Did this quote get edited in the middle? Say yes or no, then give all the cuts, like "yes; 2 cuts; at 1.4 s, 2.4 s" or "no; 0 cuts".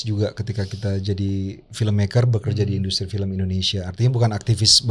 no; 0 cuts